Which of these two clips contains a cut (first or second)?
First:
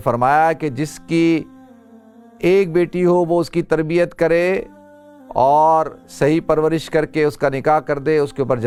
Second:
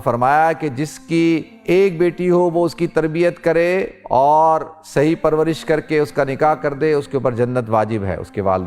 second